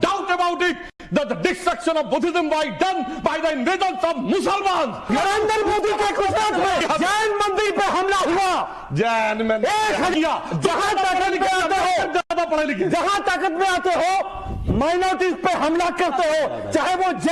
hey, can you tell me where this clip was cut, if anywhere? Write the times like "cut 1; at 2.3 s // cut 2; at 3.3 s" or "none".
cut 1; at 5.4 s // cut 2; at 6.8 s // cut 3; at 10.1 s